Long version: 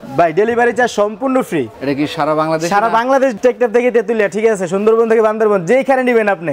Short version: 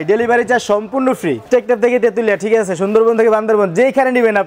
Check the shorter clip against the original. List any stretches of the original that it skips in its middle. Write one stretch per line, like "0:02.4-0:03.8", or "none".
0:01.7-0:03.4